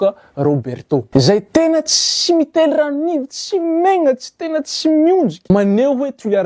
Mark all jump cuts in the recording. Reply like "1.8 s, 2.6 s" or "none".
1.1 s, 5.4 s